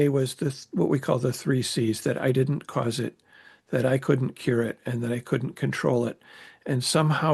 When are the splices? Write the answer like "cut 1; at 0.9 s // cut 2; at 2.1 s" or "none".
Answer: none